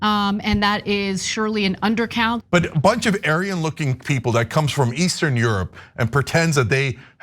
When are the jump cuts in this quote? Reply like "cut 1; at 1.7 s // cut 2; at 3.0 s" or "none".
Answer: cut 1; at 2.4 s